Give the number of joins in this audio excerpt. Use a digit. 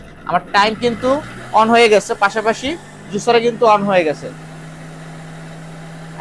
0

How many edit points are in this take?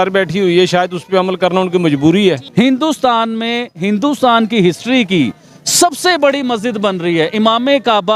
1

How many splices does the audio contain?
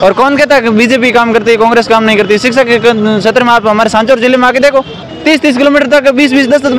1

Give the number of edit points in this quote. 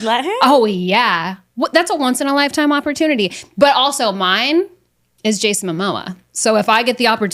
0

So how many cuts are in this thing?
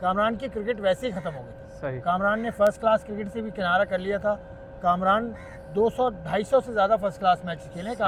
0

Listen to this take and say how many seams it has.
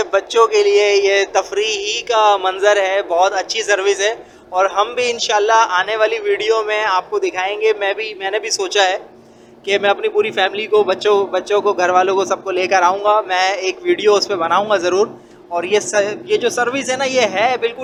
0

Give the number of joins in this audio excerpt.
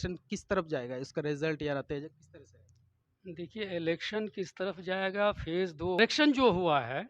1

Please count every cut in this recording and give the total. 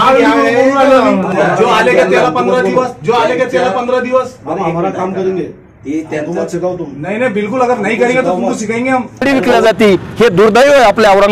2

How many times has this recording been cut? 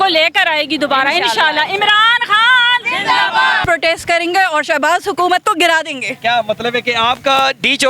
1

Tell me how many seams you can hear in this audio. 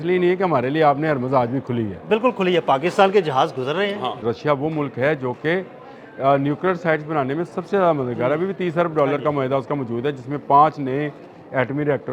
1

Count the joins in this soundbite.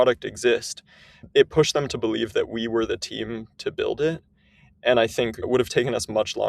2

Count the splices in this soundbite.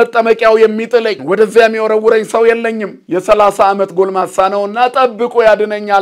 2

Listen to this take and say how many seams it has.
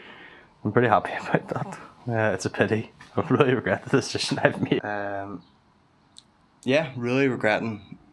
1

